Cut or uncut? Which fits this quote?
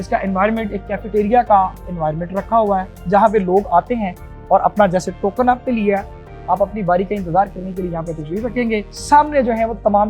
uncut